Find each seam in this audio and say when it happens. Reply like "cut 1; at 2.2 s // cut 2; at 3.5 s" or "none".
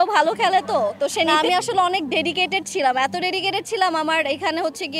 cut 1; at 1.4 s